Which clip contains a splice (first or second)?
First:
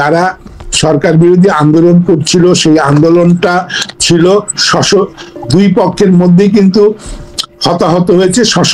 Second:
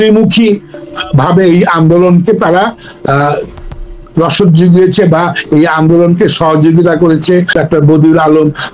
second